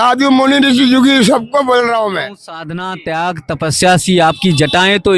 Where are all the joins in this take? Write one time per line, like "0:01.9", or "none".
0:02.5